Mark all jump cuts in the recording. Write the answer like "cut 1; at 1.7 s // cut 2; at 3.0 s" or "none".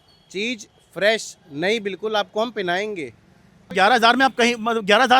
cut 1; at 3.7 s